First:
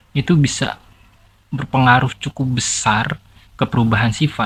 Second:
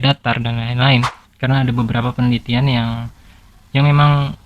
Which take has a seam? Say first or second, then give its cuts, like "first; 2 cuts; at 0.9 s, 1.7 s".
second; 1 cut; at 1.2 s